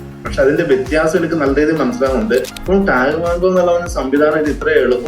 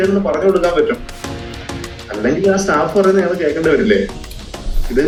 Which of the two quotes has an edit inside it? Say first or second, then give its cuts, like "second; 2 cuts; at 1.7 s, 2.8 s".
first; 1 cut; at 2.6 s